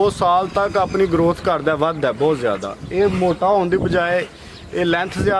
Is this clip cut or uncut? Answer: uncut